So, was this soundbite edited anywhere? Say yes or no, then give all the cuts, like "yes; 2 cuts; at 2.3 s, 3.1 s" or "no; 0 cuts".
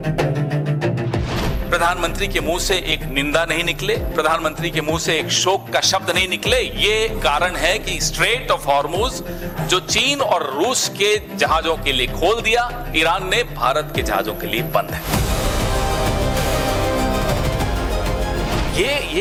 no; 0 cuts